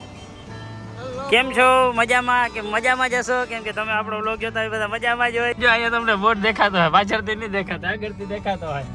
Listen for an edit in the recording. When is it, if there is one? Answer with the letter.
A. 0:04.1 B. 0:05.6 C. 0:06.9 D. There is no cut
B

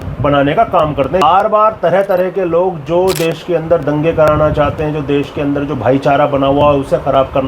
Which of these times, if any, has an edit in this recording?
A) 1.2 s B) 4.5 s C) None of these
A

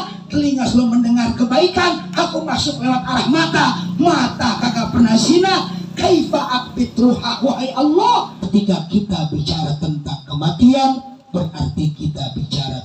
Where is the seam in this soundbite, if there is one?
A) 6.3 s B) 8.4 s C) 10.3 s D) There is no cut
B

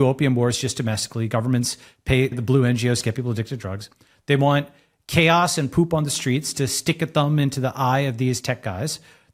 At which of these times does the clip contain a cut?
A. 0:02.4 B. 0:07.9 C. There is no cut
A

